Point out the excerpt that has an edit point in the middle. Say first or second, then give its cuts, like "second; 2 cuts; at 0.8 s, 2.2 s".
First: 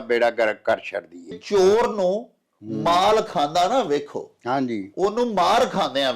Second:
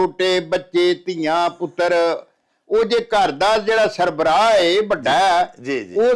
first; 1 cut; at 1.4 s